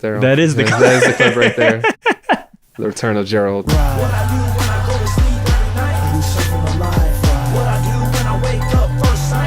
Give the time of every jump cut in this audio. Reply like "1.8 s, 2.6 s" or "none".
3.7 s